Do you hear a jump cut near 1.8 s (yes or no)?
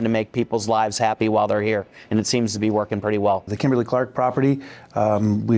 no